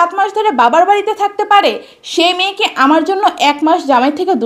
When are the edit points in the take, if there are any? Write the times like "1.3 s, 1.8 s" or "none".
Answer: none